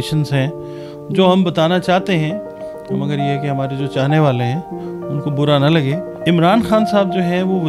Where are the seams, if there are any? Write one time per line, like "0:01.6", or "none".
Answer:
0:06.1